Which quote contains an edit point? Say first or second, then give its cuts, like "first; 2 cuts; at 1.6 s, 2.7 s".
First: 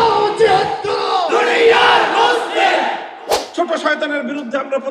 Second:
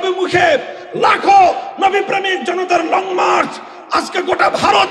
first; 1 cut; at 3.3 s